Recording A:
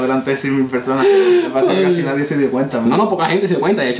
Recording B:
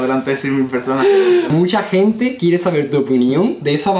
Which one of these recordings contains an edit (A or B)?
B